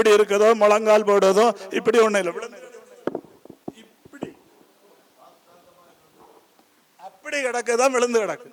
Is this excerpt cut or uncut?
uncut